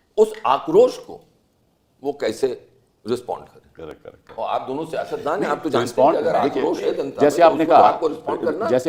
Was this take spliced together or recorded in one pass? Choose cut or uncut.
uncut